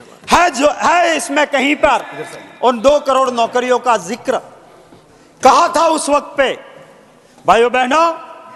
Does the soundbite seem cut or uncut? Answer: uncut